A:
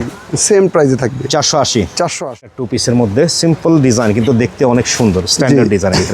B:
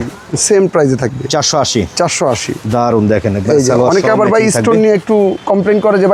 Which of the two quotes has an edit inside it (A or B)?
A